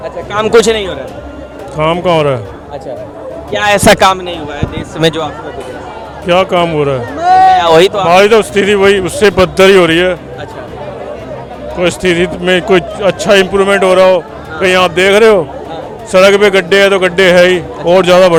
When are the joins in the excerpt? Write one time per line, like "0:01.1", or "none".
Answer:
none